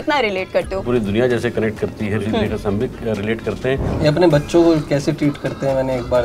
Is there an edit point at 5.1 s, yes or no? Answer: no